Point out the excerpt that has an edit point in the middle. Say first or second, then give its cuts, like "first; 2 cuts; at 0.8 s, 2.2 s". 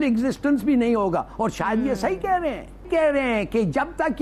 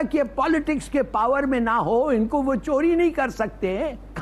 first; 1 cut; at 2.9 s